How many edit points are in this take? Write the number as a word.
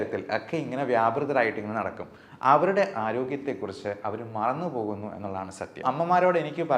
one